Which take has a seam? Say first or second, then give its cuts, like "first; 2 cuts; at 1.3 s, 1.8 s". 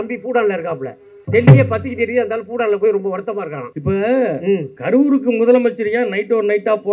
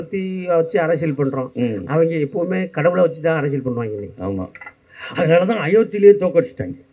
first; 3 cuts; at 1.1 s, 3.6 s, 4.7 s